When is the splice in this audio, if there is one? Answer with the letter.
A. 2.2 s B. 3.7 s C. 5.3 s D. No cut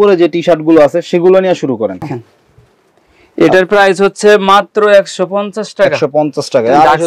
A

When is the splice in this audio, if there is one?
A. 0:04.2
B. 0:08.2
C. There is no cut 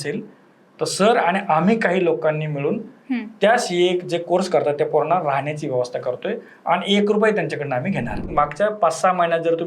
B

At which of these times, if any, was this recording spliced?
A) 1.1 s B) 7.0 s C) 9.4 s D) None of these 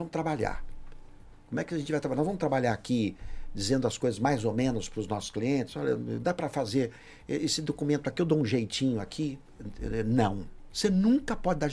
D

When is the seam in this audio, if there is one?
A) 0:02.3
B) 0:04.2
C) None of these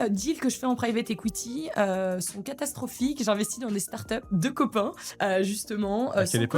B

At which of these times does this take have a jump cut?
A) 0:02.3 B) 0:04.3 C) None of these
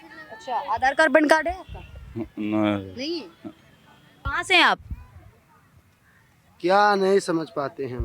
B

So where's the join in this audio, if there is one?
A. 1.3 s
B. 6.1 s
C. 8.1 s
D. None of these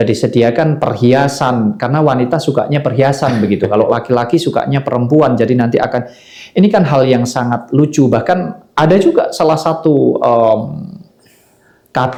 D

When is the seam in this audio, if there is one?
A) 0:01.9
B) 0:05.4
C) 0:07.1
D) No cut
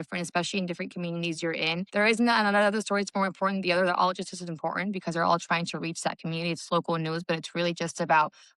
A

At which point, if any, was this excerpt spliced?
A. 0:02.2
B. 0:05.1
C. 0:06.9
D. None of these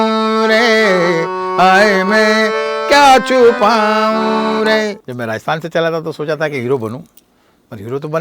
B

